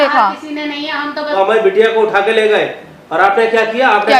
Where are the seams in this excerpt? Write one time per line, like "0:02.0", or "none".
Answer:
0:01.3